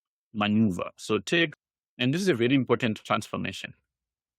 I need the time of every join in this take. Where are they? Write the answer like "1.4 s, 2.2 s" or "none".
1.7 s